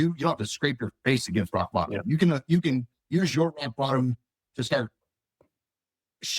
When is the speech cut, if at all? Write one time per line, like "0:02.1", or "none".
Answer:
none